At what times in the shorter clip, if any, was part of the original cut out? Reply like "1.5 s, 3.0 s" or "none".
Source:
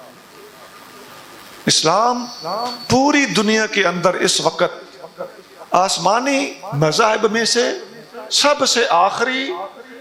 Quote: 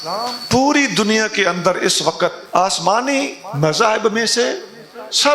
2.4 s